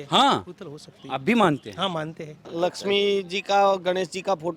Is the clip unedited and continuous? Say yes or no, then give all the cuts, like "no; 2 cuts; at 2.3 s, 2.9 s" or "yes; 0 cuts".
no; 1 cut; at 2.5 s